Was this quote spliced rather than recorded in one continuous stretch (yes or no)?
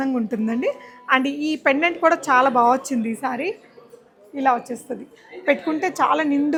no